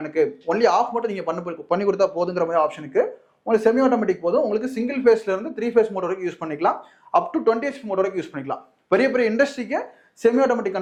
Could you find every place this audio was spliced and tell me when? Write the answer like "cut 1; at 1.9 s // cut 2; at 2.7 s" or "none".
none